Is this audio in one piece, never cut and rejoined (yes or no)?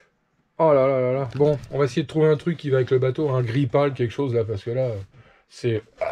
yes